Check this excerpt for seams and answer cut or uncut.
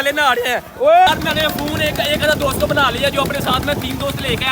cut